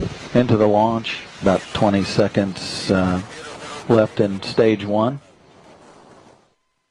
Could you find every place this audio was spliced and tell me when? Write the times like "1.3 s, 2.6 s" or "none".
5.9 s